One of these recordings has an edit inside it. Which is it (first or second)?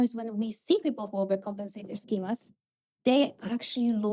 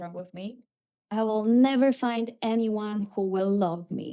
second